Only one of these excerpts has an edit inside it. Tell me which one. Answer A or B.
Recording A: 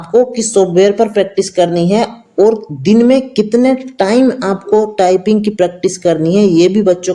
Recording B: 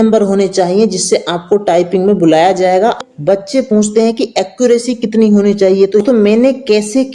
B